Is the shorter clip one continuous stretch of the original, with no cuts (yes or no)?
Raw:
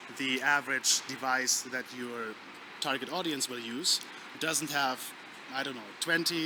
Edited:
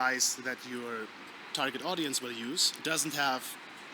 no